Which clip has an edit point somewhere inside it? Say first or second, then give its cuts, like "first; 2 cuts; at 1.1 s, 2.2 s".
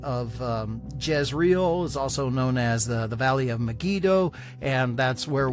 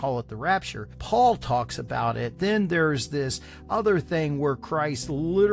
second; 1 cut; at 1.0 s